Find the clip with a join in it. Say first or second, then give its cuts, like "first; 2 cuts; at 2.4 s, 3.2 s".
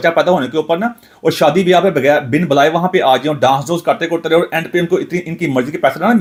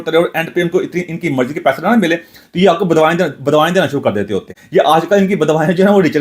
second; 1 cut; at 4.6 s